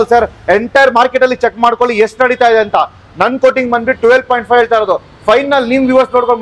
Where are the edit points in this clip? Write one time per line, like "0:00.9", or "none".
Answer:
none